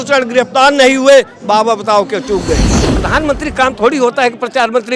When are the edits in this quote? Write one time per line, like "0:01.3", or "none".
0:02.9